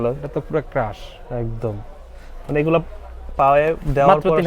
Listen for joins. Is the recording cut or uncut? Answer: uncut